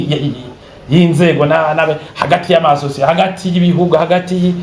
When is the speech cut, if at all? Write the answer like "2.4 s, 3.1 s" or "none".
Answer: none